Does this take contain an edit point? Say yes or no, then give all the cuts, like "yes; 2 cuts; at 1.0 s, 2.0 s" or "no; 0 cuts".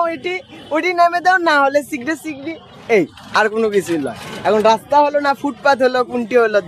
no; 0 cuts